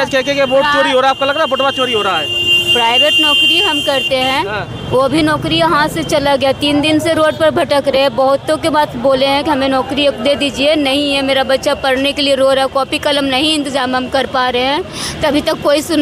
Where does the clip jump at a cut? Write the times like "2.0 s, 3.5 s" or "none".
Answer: none